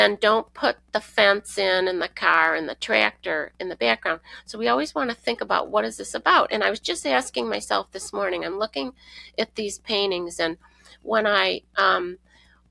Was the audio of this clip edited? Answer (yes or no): no